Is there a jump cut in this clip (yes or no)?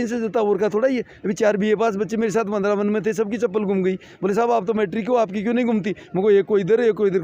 no